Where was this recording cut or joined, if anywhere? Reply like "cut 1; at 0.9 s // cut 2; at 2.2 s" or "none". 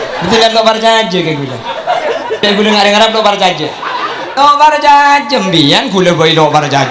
none